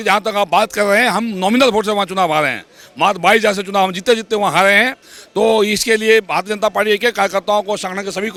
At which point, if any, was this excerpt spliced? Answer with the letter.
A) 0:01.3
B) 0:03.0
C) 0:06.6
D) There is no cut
D